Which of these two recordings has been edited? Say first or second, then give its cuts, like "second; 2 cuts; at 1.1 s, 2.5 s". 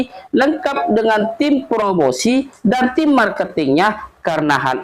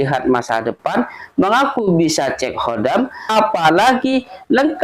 second; 1 cut; at 3.2 s